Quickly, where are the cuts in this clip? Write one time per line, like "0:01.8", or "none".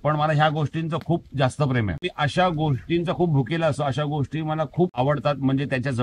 0:02.0
0:04.9